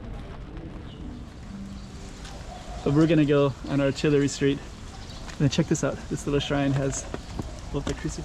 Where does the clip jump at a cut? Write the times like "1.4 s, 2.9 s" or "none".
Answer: 2.0 s